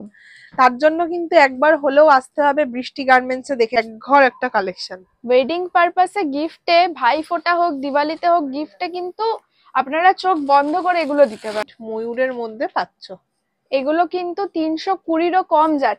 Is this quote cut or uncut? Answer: cut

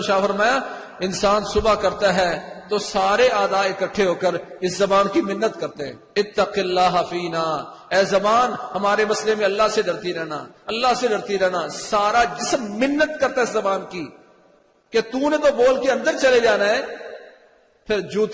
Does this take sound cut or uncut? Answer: uncut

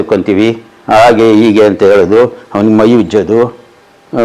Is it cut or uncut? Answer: uncut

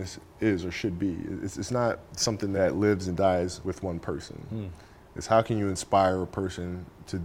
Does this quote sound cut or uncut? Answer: cut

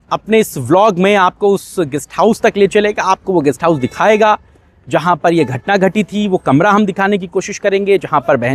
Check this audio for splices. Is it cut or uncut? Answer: uncut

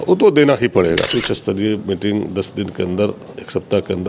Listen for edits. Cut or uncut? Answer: cut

